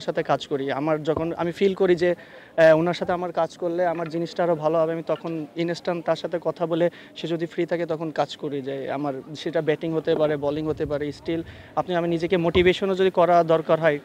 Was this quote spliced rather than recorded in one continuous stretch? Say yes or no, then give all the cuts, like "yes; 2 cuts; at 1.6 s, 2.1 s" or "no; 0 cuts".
no; 0 cuts